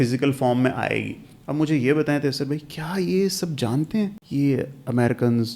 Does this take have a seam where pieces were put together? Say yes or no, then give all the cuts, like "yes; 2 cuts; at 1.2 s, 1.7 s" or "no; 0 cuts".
yes; 1 cut; at 4.2 s